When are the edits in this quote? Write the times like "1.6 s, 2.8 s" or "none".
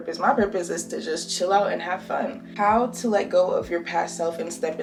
none